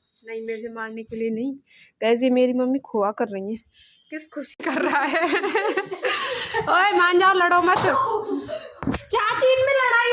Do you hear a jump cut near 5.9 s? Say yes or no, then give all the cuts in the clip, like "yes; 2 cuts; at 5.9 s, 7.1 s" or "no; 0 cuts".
no; 1 cut; at 4.6 s